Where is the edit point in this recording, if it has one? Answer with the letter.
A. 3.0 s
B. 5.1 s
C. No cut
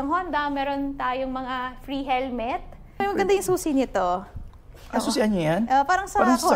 A